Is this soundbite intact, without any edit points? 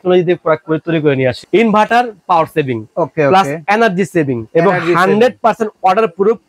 no; 2 cuts; at 1.4 s, 4.4 s

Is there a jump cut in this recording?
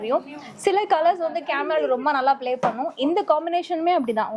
no; 0 cuts

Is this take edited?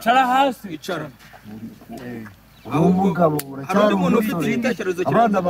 no; 0 cuts

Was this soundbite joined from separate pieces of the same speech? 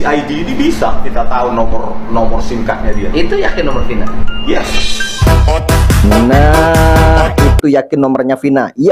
no; 0 cuts

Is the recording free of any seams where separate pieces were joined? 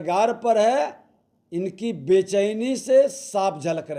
yes; 0 cuts

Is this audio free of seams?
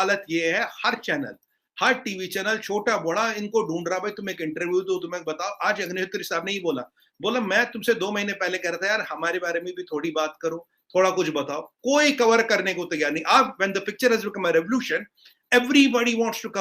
yes; 0 cuts

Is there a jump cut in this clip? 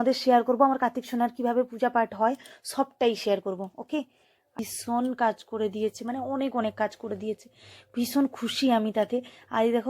yes; 1 cut; at 4.6 s

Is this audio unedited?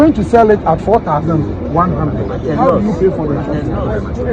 yes; 0 cuts

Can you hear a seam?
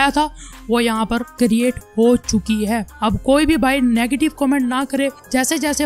no; 0 cuts

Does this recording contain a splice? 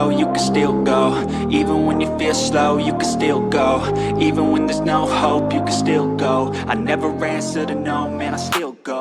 no; 0 cuts

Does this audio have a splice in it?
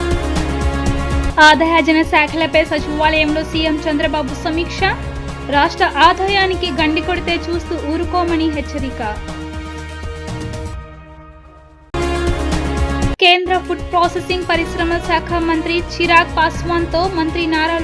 yes; 1 cut; at 1.3 s

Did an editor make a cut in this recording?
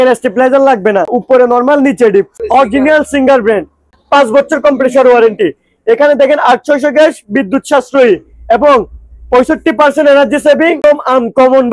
yes; 4 cuts; at 1.2 s, 2.3 s, 3.9 s, 10.8 s

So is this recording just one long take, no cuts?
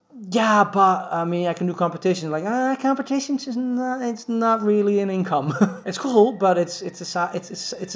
no; 1 cut; at 5.9 s

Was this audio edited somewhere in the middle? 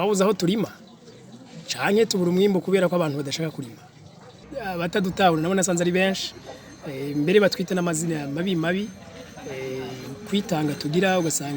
yes; 1 cut; at 4.5 s

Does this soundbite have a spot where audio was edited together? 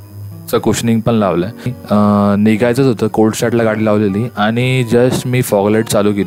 yes; 1 cut; at 1.8 s

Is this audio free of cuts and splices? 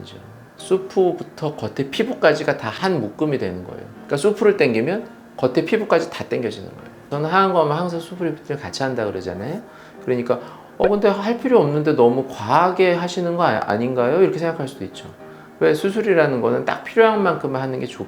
no; 1 cut; at 7.1 s

